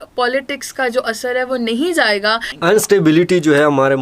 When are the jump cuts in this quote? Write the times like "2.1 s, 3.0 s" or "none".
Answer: 2.5 s